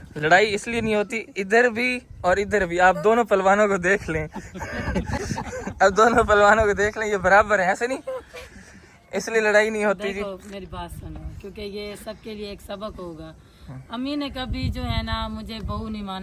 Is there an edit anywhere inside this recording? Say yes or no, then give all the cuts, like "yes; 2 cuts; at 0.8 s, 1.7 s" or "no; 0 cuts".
no; 0 cuts